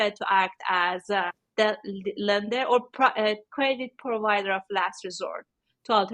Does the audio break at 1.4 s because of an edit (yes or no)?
yes